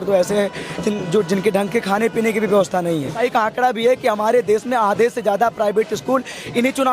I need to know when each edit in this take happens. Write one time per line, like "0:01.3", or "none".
0:03.2